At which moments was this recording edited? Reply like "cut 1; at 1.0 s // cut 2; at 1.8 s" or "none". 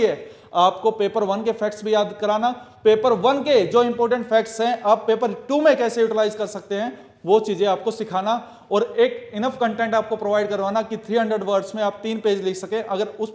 none